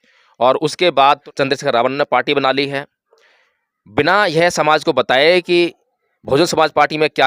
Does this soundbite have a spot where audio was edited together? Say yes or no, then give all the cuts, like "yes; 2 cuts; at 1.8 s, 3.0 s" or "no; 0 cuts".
yes; 1 cut; at 1.2 s